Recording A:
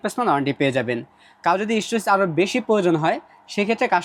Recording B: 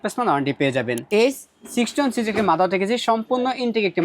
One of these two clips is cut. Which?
B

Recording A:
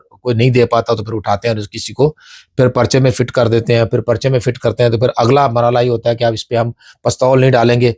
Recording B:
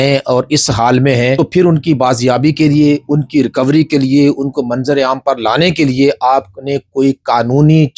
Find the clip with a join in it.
B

